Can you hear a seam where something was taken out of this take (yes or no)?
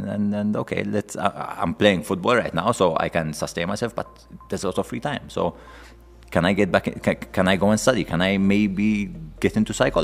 no